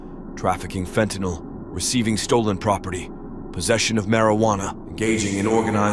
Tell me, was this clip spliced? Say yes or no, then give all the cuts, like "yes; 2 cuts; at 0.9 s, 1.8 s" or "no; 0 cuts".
yes; 1 cut; at 4.8 s